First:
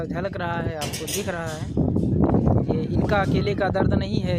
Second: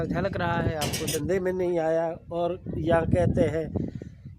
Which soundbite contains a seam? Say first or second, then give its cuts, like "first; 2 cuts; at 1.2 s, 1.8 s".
second; 1 cut; at 1.1 s